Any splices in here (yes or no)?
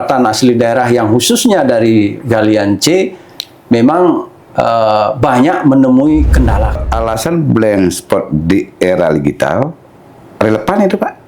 yes